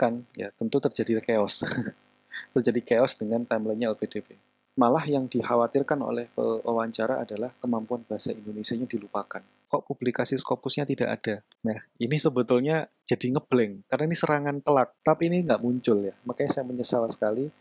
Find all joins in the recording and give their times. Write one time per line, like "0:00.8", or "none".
0:04.6
0:09.5
0:14.9